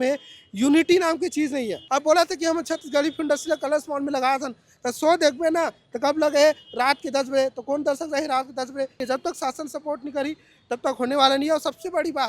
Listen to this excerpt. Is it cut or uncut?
cut